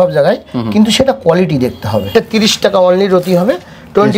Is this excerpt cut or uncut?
cut